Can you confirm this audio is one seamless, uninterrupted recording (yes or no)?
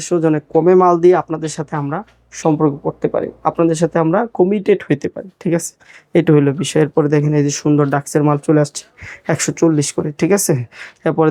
yes